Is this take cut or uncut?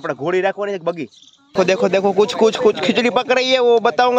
cut